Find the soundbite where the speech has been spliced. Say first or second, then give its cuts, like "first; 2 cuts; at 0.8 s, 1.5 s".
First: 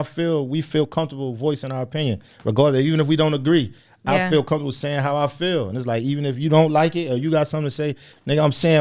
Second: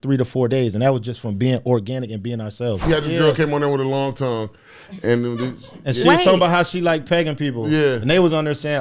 second; 1 cut; at 2.8 s